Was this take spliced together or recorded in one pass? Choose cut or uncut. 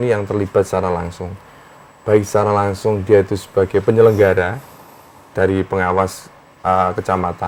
uncut